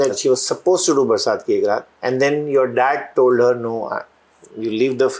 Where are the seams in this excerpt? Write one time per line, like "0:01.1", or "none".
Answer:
0:01.9